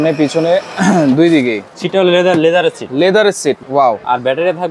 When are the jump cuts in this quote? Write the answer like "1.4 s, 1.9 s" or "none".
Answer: 1.7 s, 3.6 s